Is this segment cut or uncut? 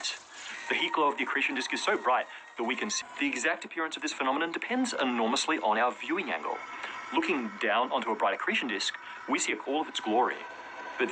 cut